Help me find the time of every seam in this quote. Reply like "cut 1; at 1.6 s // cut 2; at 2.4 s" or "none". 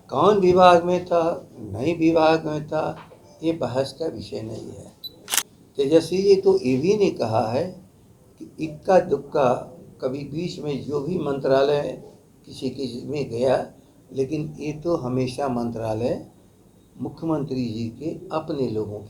none